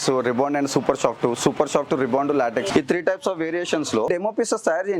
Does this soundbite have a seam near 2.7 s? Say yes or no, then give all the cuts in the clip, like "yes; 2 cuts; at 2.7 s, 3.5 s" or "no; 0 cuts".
yes; 2 cuts; at 2.7 s, 4.1 s